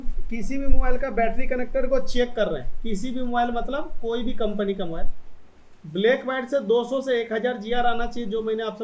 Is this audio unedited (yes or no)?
yes